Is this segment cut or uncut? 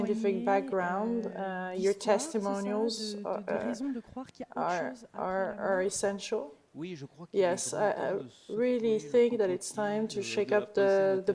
cut